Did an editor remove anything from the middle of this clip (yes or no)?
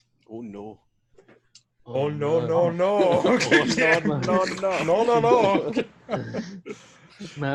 no